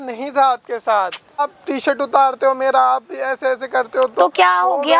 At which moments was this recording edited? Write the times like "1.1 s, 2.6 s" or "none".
1.4 s